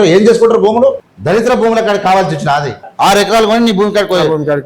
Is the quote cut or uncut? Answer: cut